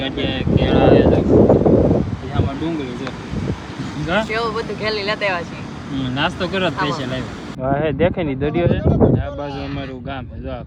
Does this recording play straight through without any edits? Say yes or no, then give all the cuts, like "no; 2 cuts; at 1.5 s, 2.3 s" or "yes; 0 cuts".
no; 1 cut; at 7.6 s